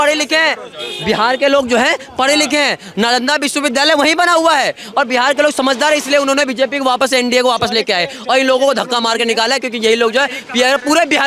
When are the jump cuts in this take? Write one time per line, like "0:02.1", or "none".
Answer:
none